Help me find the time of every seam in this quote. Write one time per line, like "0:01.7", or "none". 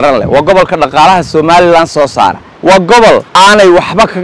0:02.5
0:03.3